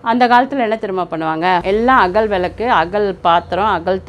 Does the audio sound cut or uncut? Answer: cut